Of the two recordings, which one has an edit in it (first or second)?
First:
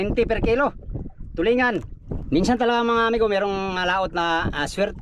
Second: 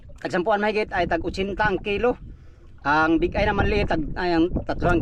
first